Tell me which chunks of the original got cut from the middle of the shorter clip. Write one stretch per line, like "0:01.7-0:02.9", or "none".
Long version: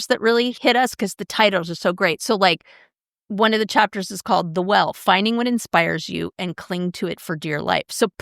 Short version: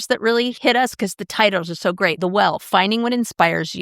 0:02.2-0:04.5